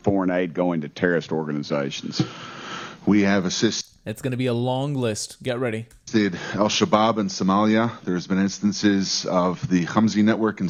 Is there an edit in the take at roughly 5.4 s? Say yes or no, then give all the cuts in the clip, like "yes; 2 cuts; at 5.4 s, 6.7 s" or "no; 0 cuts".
no; 0 cuts